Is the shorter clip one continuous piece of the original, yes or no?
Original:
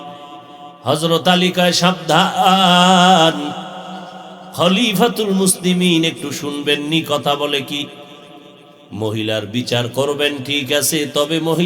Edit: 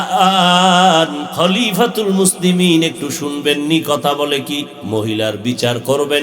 no